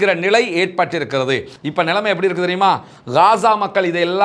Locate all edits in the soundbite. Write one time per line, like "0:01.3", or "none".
0:01.5